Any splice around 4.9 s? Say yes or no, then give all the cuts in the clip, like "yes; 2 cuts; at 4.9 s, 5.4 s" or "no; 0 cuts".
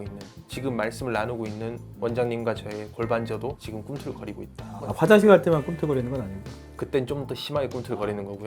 yes; 2 cuts; at 3.6 s, 4.9 s